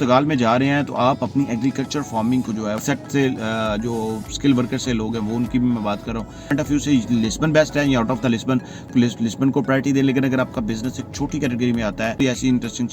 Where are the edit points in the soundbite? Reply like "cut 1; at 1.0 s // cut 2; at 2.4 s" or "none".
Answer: cut 1; at 2.8 s // cut 2; at 6.5 s // cut 3; at 8.9 s // cut 4; at 12.2 s

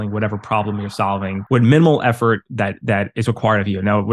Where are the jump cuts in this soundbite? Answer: cut 1; at 1.4 s

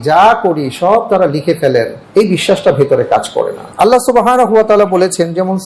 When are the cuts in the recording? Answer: cut 1; at 2.0 s // cut 2; at 3.6 s

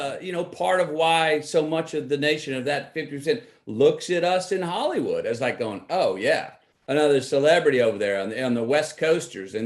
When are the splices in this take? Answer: none

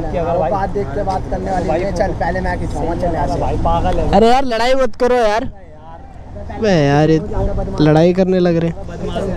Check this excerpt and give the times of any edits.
none

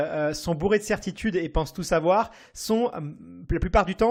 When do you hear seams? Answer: none

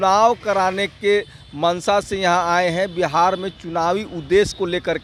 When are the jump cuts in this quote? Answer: none

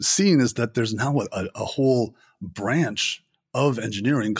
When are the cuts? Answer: none

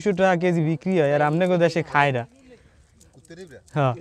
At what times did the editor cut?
none

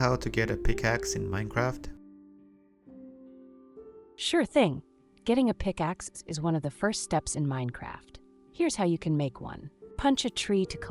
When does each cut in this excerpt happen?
none

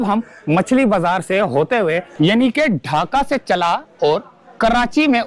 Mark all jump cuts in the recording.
cut 1; at 2.1 s

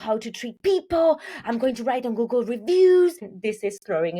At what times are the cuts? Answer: cut 1; at 3.3 s

